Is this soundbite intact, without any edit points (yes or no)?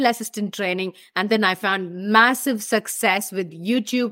yes